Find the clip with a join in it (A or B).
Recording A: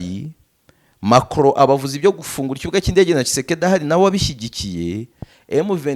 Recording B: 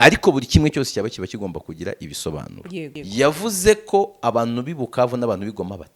B